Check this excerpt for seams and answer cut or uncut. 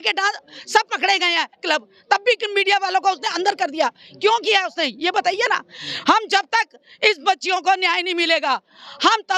uncut